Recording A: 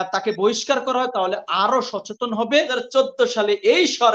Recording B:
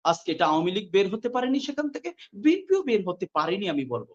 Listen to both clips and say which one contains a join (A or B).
A